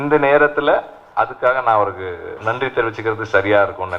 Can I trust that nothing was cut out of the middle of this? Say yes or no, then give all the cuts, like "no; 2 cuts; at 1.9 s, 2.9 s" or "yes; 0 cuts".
no; 2 cuts; at 1.0 s, 2.4 s